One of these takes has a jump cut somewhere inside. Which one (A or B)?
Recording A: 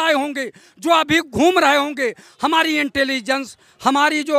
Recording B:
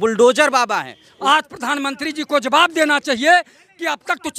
B